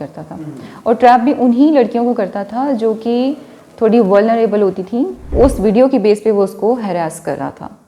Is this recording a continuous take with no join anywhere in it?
no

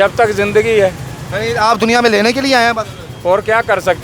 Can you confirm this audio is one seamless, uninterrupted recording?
yes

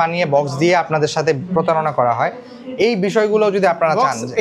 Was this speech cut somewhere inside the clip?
no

